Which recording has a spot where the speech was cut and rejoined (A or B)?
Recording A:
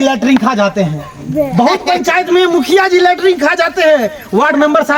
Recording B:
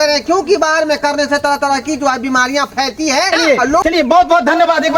B